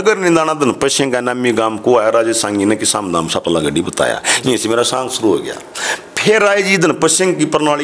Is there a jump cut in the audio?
no; 0 cuts

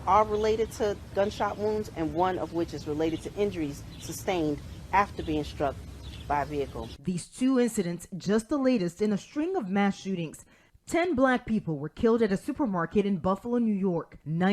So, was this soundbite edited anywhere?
yes; 1 cut; at 11.9 s

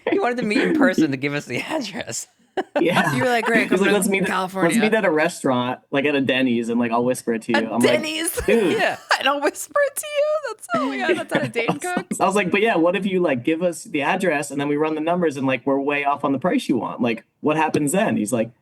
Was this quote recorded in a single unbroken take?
no; 1 cut; at 12.1 s

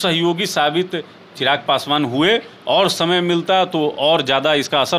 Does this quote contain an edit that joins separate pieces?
no; 0 cuts

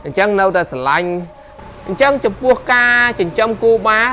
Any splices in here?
yes; 1 cut; at 1.4 s

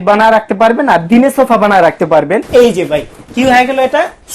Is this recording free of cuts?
no; 2 cuts; at 2.4 s, 3.2 s

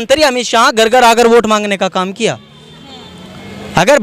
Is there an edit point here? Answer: no; 0 cuts

